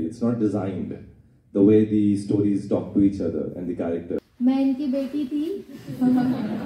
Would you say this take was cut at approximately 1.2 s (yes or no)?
no